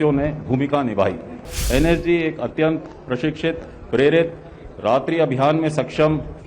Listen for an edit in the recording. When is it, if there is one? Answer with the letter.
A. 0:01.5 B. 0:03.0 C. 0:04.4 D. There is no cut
A